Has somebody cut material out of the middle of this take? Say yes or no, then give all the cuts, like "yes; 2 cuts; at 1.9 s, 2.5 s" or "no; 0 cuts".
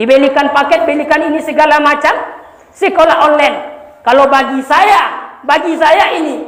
no; 0 cuts